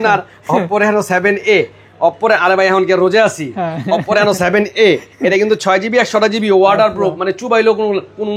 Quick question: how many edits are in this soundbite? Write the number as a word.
zero